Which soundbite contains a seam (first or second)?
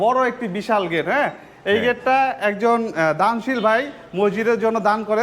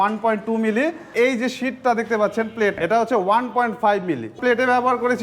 second